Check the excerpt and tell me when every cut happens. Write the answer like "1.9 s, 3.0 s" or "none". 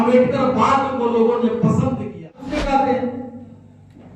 2.5 s